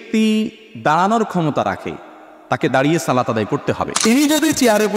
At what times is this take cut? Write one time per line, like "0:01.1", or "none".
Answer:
0:03.9